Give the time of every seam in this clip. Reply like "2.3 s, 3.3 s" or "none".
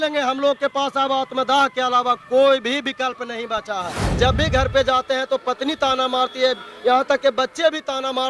4.0 s